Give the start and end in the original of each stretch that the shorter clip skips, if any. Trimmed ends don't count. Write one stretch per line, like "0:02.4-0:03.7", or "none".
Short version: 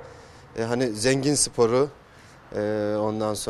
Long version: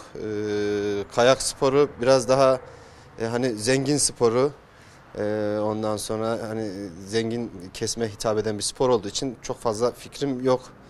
none